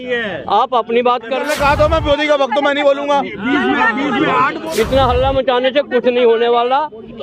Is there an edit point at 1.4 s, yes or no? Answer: yes